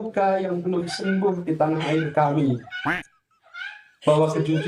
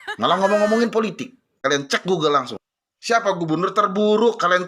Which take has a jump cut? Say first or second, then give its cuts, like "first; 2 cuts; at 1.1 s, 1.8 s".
second; 1 cut; at 1.6 s